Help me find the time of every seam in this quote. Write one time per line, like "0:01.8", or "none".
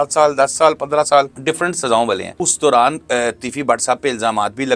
0:01.3
0:02.3